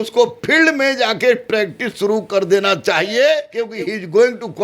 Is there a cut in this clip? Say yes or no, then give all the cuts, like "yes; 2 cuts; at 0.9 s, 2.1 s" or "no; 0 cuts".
yes; 1 cut; at 3.6 s